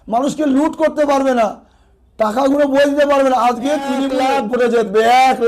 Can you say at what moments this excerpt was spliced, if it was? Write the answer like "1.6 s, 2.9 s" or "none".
4.2 s